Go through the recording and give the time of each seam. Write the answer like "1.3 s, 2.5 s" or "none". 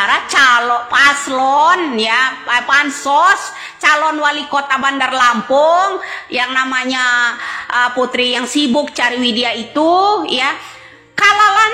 none